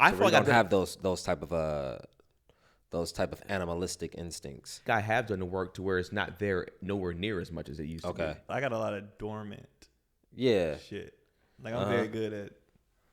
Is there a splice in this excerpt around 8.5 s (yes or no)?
yes